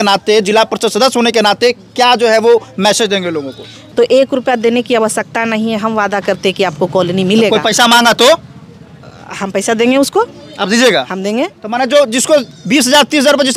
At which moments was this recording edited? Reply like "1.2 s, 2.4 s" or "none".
3.8 s